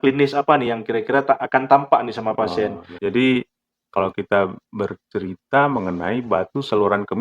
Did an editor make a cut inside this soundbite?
yes; 1 cut; at 2.9 s

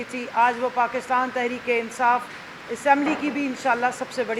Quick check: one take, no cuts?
yes; 0 cuts

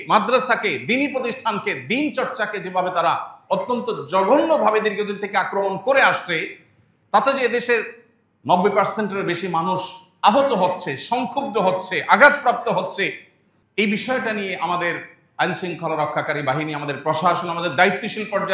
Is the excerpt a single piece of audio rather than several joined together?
yes; 0 cuts

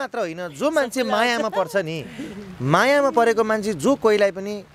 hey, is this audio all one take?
yes; 0 cuts

